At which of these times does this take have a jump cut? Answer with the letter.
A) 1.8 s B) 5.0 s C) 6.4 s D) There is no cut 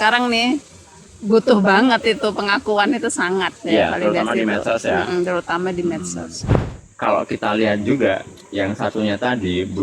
C